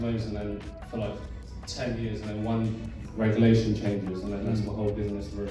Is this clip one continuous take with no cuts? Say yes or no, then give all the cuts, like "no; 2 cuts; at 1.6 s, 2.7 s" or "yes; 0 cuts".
yes; 0 cuts